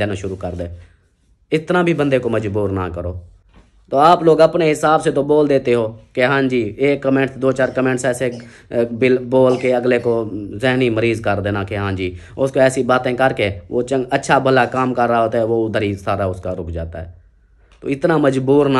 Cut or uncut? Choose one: uncut